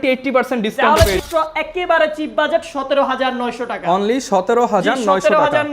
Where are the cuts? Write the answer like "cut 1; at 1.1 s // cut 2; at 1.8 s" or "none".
cut 1; at 1.2 s